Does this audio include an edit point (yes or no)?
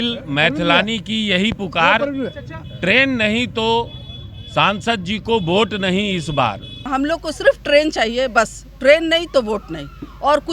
yes